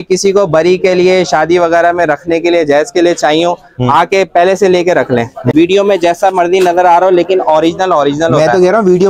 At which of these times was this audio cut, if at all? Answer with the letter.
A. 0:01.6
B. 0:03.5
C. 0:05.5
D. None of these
C